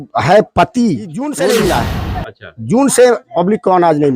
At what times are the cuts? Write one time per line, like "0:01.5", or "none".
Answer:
0:01.2